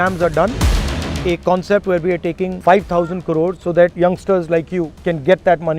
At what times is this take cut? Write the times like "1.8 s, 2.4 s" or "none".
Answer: 1.0 s, 2.5 s, 3.8 s, 4.9 s